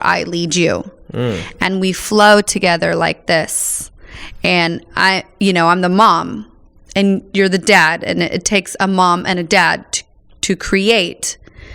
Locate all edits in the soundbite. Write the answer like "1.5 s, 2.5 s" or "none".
none